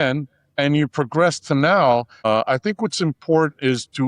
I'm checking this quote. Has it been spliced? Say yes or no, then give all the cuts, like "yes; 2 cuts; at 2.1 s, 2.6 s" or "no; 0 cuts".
yes; 1 cut; at 2.3 s